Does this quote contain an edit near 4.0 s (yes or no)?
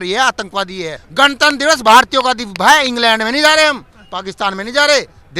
no